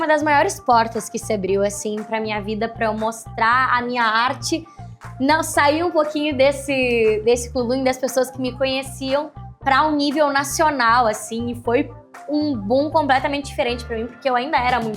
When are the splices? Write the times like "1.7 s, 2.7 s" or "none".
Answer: none